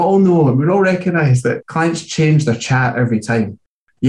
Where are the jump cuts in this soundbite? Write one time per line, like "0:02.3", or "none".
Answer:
0:01.6